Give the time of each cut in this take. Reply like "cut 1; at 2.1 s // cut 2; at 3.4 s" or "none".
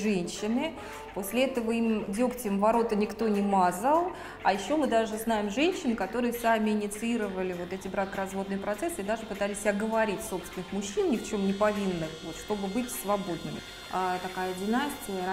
cut 1; at 13.6 s